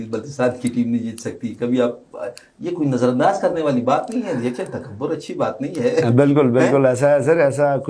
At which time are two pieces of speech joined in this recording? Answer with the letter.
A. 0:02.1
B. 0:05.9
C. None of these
C